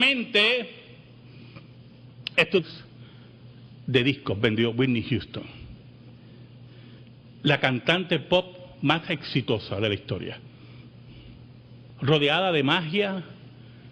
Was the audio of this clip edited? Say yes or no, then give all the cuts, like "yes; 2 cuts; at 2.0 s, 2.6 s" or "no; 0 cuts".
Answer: no; 0 cuts